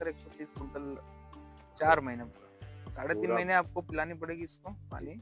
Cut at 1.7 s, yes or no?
yes